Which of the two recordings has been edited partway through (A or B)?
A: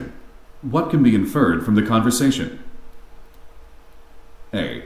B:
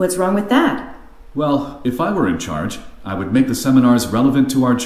B